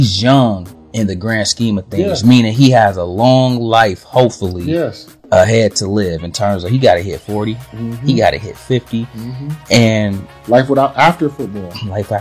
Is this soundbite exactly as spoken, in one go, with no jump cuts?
yes; 0 cuts

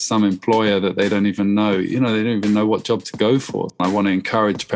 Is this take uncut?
no; 1 cut; at 3.8 s

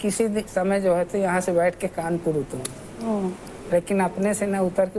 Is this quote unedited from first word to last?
yes; 0 cuts

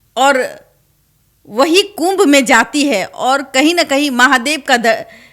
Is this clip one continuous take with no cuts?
yes; 0 cuts

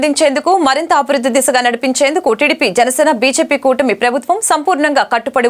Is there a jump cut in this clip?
no; 0 cuts

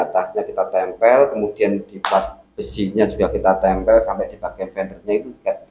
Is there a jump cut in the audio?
no; 0 cuts

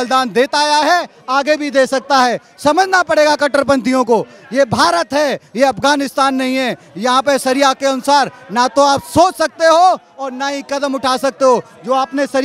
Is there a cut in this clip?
no; 0 cuts

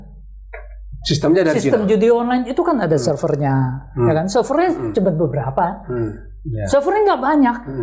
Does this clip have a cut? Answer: no; 0 cuts

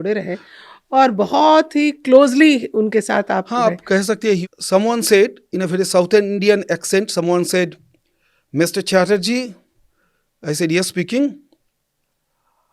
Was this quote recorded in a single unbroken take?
no; 1 cut; at 4.4 s

